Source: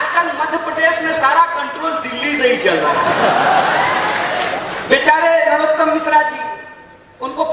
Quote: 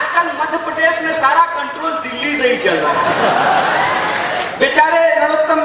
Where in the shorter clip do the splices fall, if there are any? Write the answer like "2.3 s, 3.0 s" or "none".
4.5 s